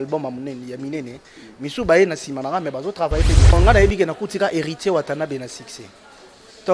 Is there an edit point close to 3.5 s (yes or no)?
yes